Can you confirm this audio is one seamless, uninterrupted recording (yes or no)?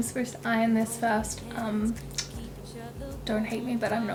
yes